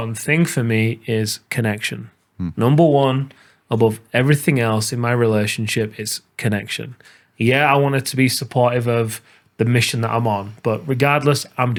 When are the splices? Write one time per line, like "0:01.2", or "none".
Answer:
none